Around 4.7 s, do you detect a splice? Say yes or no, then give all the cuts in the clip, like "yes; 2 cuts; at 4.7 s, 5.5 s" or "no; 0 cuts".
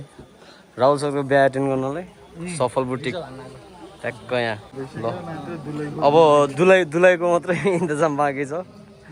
yes; 1 cut; at 4.7 s